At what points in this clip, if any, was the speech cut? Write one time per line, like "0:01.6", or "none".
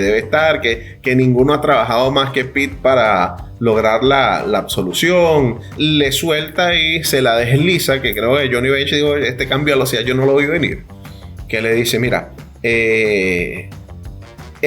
0:05.7

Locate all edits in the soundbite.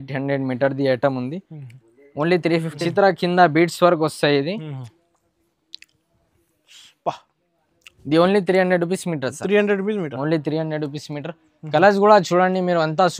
0:02.8

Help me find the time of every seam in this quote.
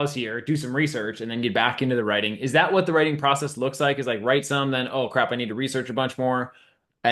none

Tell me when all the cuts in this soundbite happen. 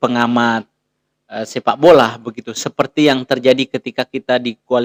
none

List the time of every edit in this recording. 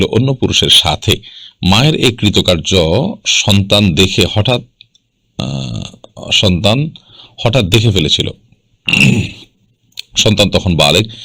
none

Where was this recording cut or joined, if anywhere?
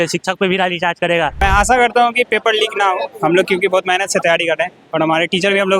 0:01.4

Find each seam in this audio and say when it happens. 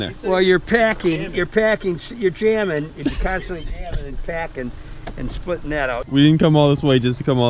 0:06.0

